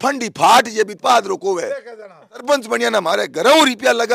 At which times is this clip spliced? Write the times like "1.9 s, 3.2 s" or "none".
2.4 s